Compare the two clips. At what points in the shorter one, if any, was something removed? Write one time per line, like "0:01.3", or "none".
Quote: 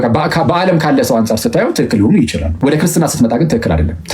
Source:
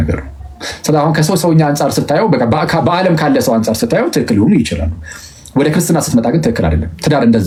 0:02.4